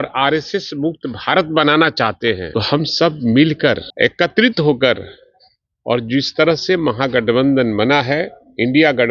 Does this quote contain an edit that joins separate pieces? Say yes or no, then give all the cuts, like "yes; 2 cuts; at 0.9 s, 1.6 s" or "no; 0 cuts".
yes; 2 cuts; at 2.4 s, 3.9 s